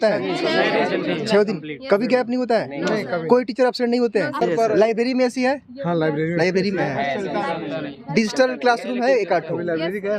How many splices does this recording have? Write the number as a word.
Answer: one